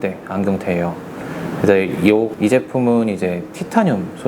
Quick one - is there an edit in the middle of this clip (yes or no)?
yes